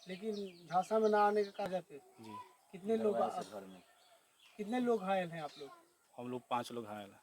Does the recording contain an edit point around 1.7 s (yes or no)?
yes